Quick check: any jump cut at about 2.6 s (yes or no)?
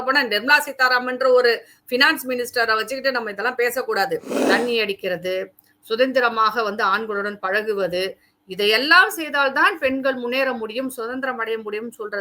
no